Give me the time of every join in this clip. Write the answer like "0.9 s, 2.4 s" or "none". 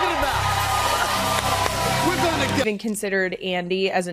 2.6 s

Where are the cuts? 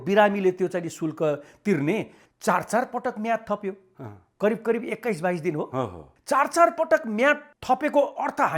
2.1 s

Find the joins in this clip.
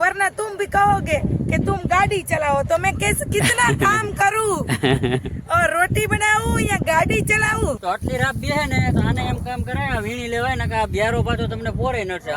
7.8 s

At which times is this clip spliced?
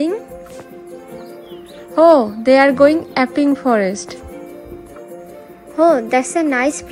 1.3 s, 4.5 s

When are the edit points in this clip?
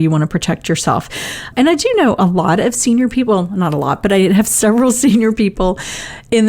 1.5 s

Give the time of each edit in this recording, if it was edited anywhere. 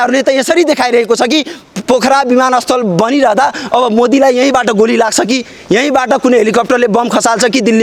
none

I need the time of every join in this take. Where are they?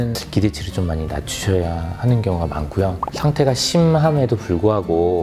none

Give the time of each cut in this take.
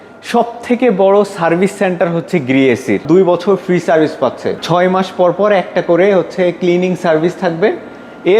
3.0 s, 4.6 s

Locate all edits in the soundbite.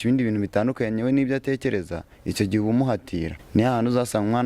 3.4 s

